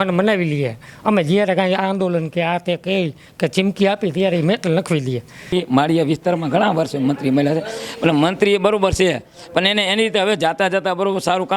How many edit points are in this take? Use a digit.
1